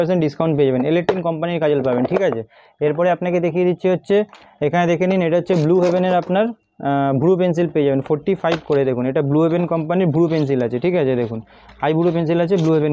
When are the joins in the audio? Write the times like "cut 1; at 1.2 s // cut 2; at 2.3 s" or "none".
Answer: none